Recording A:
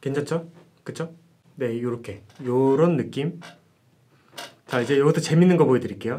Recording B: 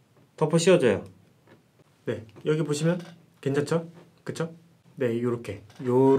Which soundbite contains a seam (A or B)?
B